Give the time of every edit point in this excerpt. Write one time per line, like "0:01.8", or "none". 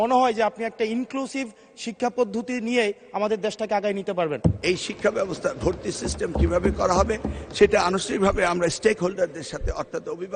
0:04.6